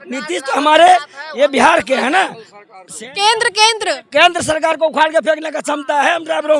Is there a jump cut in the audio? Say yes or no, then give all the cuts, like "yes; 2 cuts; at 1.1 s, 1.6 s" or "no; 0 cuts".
no; 0 cuts